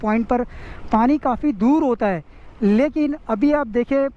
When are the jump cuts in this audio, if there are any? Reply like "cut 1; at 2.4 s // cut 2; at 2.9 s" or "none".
none